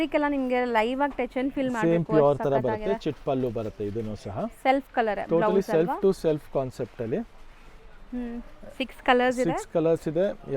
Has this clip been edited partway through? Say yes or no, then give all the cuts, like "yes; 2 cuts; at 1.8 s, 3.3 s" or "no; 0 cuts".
no; 0 cuts